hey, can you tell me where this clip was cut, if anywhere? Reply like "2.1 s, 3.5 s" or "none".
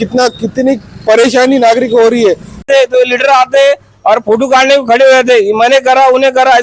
2.7 s